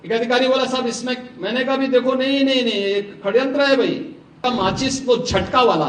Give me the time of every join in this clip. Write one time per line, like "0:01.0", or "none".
0:04.4